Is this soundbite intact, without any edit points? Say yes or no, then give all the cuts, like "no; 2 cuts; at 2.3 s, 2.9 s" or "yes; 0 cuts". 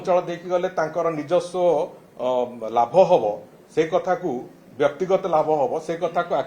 yes; 0 cuts